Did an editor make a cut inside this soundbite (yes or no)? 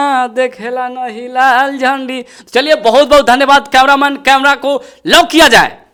no